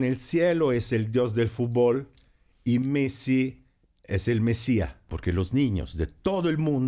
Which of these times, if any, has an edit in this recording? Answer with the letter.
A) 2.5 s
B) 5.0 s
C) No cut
B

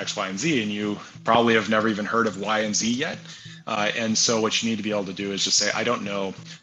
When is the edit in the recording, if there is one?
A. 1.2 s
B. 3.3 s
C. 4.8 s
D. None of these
D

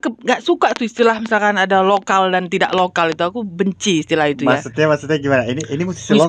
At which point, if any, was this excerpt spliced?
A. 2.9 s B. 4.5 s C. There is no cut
C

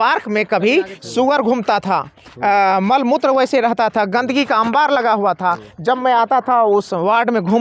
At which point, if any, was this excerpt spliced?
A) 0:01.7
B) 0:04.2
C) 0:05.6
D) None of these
D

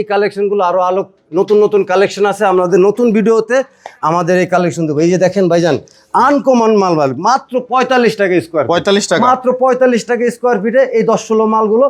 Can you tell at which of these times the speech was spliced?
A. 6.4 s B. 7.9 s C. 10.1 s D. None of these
D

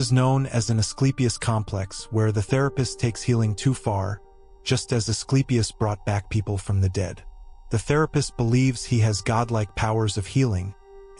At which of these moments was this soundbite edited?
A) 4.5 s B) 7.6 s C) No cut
C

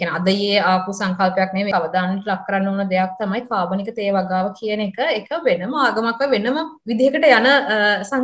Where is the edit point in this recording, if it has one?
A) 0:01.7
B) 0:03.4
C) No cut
A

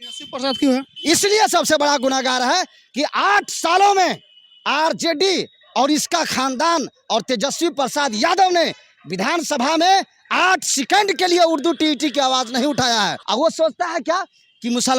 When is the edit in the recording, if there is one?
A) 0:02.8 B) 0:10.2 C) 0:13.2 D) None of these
C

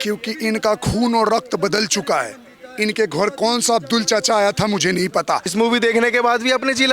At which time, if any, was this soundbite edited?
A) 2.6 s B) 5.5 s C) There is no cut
B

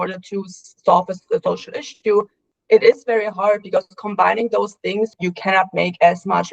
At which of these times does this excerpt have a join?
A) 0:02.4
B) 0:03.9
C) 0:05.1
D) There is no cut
C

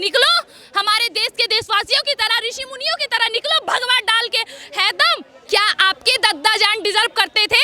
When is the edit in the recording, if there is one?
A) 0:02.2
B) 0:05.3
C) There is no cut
B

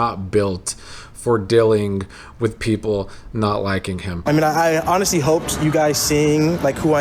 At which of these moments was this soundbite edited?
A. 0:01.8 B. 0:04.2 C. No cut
B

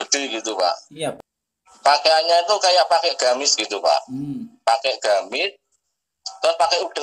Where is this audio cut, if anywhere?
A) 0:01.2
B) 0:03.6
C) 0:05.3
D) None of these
A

